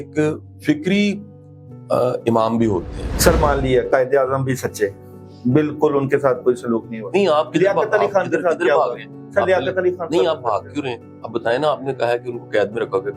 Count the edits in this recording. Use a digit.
1